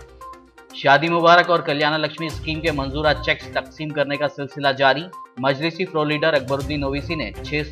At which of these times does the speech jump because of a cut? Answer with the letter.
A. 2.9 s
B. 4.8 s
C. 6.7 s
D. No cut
D